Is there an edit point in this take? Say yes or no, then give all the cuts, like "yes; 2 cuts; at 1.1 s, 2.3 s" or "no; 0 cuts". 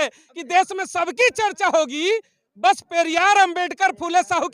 no; 0 cuts